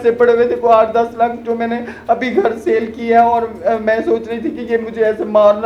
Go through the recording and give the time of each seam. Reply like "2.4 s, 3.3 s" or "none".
none